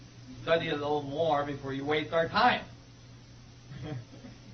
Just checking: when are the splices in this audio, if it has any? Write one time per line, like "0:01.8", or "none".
0:03.0